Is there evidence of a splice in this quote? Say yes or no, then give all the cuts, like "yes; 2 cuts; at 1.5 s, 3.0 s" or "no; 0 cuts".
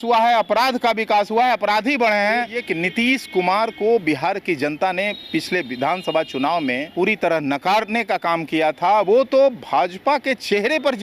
yes; 2 cuts; at 2.6 s, 6.9 s